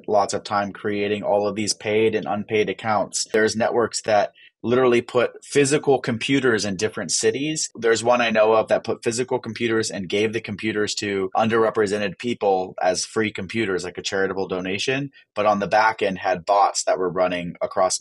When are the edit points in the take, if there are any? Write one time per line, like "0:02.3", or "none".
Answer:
0:03.3
0:07.7
0:11.3